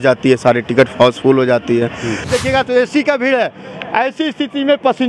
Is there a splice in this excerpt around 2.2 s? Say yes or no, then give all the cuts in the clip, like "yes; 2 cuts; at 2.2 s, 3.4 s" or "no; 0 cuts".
yes; 1 cut; at 2.2 s